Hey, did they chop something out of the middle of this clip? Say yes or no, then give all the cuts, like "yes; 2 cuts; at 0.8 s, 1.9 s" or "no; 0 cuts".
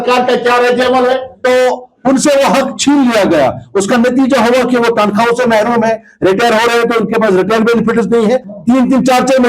yes; 2 cuts; at 1.3 s, 8.5 s